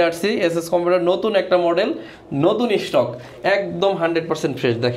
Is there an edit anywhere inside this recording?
no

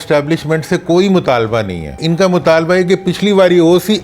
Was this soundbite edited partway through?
yes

